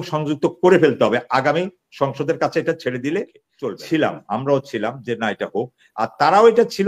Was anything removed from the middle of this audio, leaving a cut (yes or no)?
yes